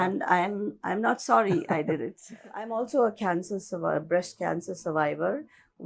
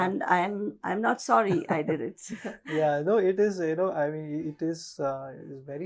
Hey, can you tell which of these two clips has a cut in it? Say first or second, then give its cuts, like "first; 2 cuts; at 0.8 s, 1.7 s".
first; 1 cut; at 2.7 s